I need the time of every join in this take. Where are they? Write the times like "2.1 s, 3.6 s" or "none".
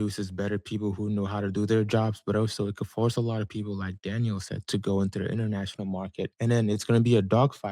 6.3 s